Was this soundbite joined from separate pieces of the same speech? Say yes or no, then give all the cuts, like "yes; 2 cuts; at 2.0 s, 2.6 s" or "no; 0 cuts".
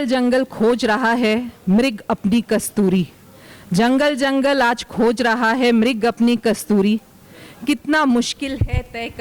no; 0 cuts